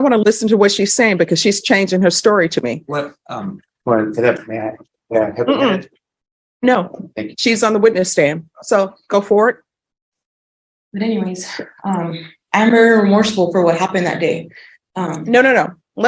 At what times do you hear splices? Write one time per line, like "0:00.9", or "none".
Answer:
none